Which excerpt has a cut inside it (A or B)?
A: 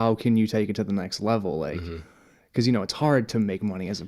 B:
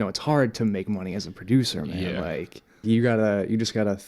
B